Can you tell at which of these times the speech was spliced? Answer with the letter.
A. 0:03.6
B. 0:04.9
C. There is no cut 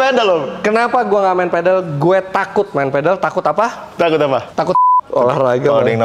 B